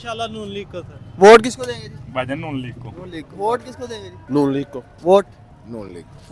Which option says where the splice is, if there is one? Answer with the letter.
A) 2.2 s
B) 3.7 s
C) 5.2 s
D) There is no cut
B